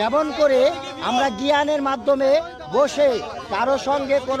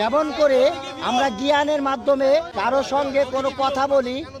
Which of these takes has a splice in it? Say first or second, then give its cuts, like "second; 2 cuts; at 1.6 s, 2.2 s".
second; 1 cut; at 2.5 s